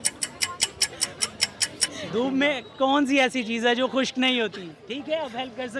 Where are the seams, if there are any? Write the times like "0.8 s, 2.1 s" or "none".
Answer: none